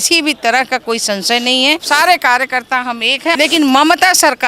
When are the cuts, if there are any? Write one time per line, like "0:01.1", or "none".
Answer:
0:01.8
0:03.3